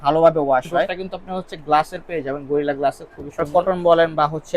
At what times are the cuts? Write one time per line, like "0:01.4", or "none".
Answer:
0:01.1
0:03.4